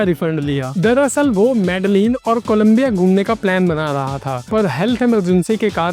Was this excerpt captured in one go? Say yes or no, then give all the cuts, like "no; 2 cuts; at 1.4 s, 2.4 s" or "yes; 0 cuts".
yes; 0 cuts